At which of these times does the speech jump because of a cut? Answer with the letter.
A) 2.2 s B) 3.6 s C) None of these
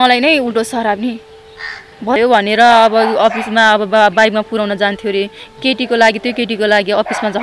A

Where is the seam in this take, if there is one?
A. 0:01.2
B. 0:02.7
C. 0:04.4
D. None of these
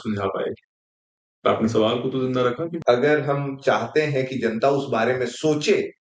B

